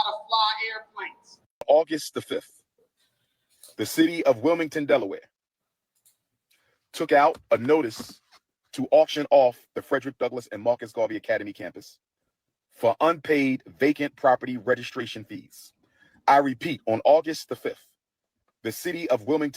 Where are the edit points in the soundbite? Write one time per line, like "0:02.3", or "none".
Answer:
0:01.6